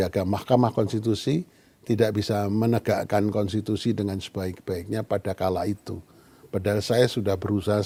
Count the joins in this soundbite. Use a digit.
0